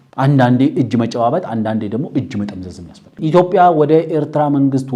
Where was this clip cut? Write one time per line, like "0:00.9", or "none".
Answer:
0:03.2

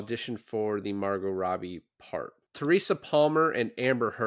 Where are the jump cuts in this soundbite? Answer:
0:02.4

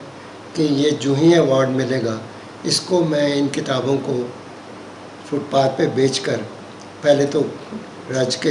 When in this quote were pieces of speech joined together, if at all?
none

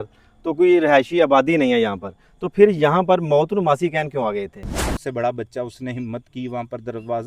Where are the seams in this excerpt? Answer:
0:04.9

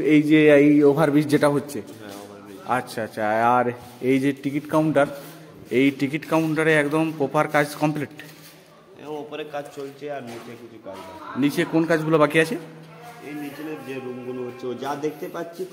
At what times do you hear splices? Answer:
none

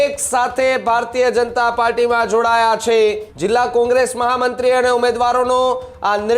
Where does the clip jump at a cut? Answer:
0:03.3

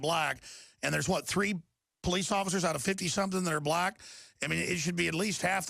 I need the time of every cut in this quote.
none

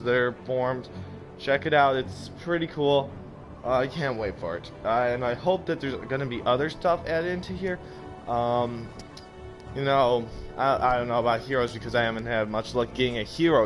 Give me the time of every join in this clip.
none

